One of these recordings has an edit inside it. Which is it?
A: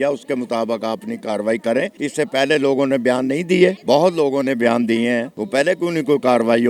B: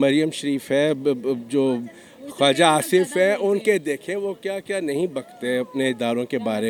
A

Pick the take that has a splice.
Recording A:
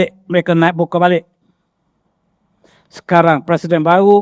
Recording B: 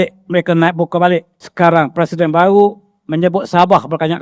B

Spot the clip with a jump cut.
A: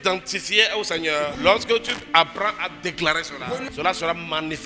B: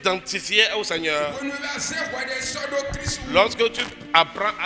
A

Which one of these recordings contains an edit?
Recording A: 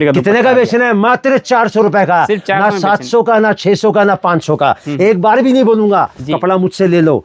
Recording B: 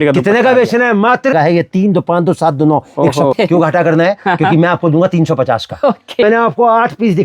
B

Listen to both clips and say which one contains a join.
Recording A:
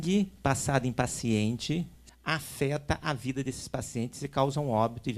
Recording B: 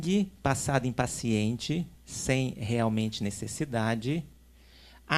A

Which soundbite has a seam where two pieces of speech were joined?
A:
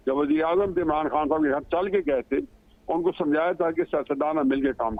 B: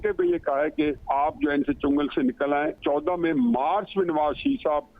B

